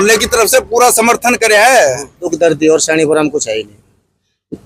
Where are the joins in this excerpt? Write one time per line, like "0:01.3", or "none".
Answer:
0:02.2